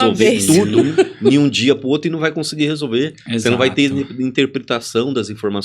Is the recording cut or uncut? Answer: uncut